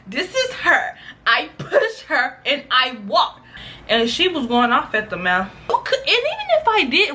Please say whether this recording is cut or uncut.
cut